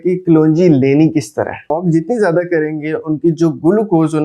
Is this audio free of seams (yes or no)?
no